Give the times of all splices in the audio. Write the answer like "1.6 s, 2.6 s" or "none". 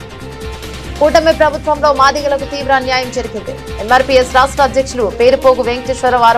none